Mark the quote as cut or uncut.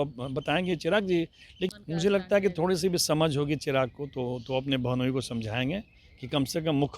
cut